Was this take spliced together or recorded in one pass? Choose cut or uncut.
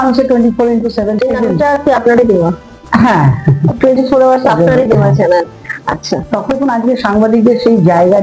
cut